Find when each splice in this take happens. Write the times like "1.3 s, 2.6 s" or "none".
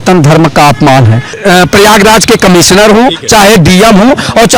1.3 s

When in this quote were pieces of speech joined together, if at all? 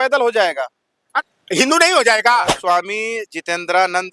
1.1 s, 2.6 s

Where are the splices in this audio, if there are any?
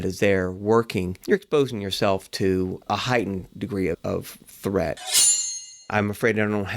1.1 s, 2.9 s, 4.0 s, 5.3 s

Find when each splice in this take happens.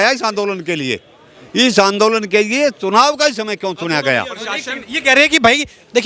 none

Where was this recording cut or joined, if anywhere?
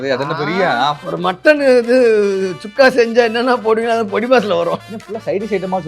1.0 s, 4.8 s

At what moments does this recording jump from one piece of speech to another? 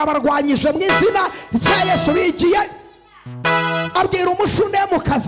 3.9 s

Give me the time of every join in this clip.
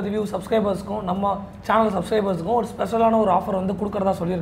none

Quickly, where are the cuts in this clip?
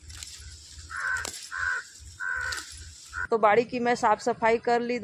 3.2 s

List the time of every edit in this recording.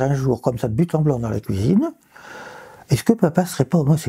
none

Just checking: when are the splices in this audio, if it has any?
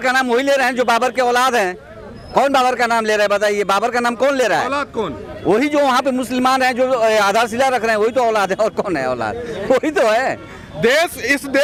none

